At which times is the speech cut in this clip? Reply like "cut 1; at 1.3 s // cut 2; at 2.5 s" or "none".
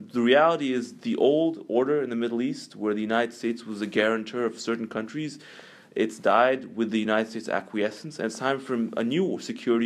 none